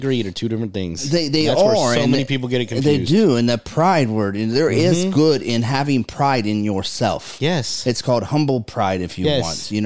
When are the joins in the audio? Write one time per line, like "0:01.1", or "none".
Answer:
none